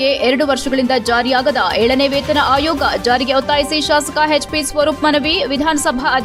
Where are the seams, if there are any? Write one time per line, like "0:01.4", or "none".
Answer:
none